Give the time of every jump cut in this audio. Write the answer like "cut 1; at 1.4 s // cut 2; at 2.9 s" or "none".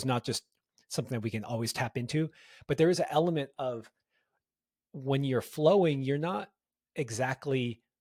none